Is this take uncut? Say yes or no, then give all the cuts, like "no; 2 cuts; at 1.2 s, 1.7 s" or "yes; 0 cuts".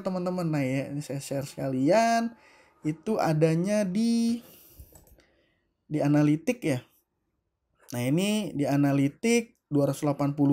yes; 0 cuts